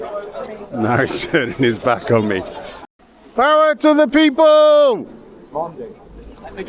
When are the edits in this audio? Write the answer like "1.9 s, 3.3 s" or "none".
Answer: 2.8 s